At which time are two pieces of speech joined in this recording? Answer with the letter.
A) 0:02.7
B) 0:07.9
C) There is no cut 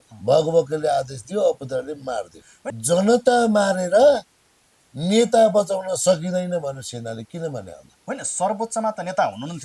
A